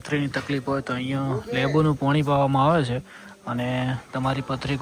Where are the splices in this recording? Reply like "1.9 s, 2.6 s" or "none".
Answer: none